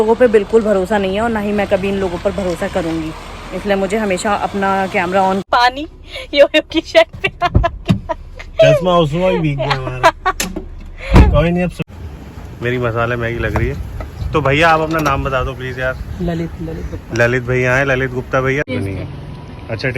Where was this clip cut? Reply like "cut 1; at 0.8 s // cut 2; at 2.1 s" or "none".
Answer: cut 1; at 5.4 s // cut 2; at 11.8 s // cut 3; at 18.7 s